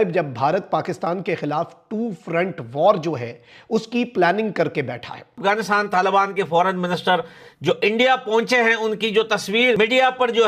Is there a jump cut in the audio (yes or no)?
yes